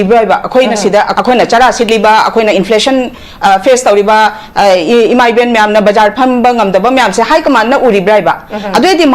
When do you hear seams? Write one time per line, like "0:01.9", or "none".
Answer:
0:01.1